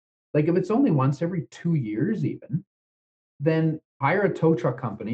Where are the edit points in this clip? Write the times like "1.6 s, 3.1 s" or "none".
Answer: 3.9 s